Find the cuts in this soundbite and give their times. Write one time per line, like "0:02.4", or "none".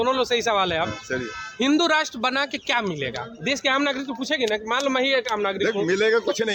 none